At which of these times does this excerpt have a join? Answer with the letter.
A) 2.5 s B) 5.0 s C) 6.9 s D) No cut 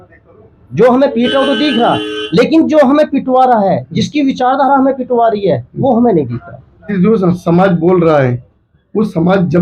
C